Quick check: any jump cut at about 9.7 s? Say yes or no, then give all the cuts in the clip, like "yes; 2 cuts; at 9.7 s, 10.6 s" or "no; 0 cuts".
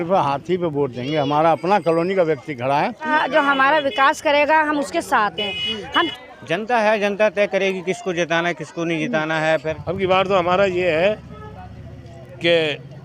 yes; 3 cuts; at 3.1 s, 6.1 s, 9.7 s